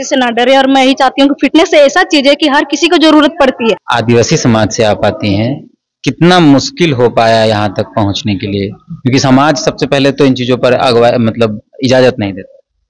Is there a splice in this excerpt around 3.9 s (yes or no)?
yes